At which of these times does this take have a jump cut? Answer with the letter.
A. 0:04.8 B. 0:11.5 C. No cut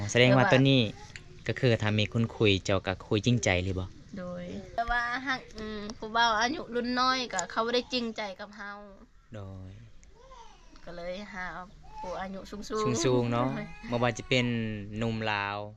A